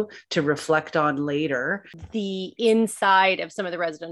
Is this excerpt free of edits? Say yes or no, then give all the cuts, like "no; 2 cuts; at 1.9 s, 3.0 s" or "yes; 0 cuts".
no; 1 cut; at 1.9 s